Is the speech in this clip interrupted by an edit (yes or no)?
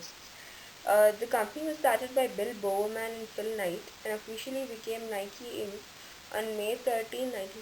no